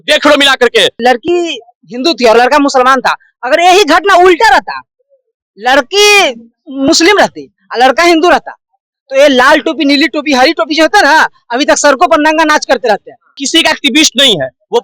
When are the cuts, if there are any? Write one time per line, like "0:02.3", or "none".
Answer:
0:01.0
0:13.4